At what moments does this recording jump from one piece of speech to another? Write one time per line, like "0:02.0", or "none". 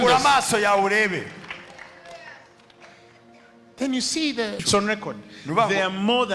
0:04.6